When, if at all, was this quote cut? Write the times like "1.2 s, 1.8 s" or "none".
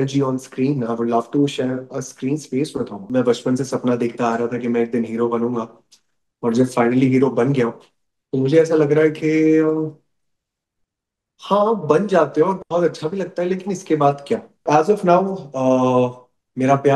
3.0 s, 14.6 s